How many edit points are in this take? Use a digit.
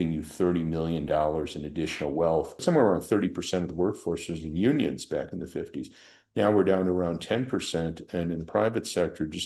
1